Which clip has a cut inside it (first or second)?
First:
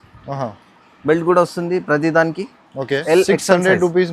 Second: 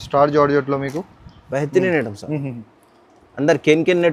first